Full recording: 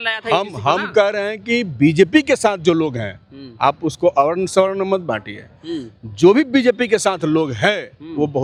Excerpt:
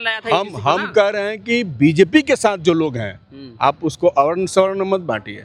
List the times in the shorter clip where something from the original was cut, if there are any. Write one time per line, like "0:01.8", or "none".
none

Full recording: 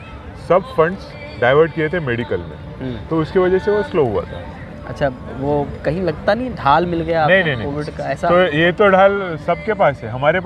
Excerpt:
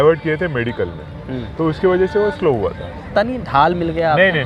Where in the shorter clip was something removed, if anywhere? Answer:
0:03.1

